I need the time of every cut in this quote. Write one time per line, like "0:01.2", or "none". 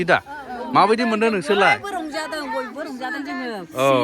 none

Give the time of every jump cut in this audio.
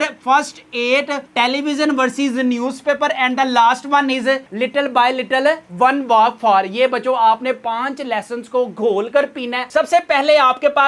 0:09.6

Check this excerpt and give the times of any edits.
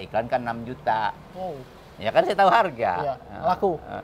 0:01.3

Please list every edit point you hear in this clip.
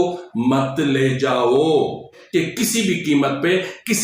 0:02.2

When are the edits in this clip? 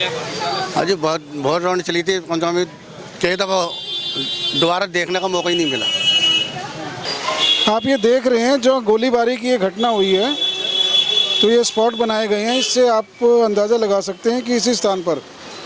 0:07.1

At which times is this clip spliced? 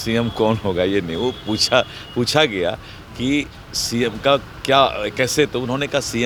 none

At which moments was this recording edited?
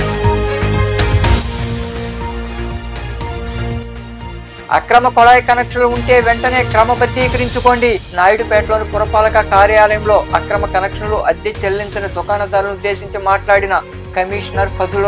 0:01.1

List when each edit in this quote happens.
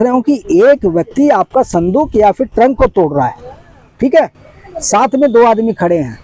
none

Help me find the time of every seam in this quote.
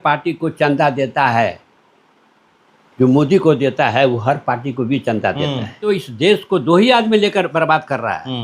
0:05.9

